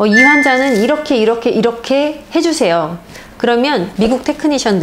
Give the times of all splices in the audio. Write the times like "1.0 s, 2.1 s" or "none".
3.9 s